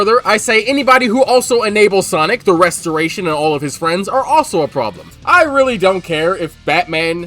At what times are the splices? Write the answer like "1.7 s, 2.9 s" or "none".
5.1 s